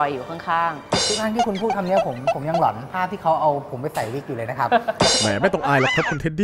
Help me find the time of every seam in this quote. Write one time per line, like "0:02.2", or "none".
none

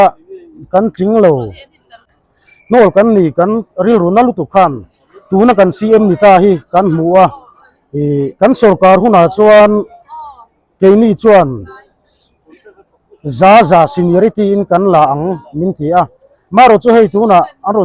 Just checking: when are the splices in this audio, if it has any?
0:02.1

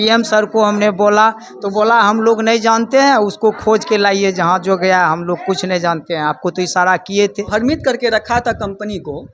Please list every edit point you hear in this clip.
0:07.4

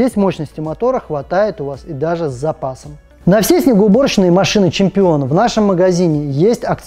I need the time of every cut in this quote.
0:03.0

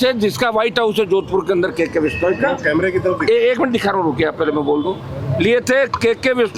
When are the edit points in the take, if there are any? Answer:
none

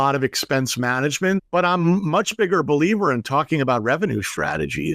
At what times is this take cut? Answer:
0:01.4

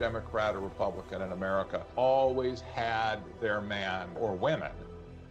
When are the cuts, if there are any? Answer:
0:01.8
0:04.2

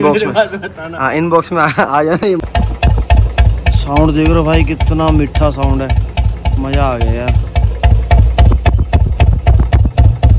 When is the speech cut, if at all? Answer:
0:02.4

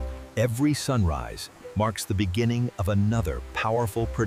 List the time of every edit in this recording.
none

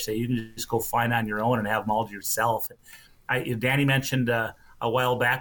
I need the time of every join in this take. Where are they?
none

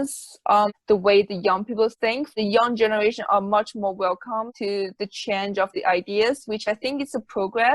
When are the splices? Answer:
0:02.3

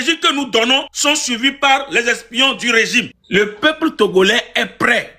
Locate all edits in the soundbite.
0:00.9
0:03.2

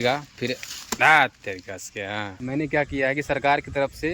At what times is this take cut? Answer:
0:02.3

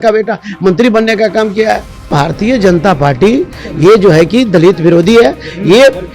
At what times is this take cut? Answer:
0:02.1

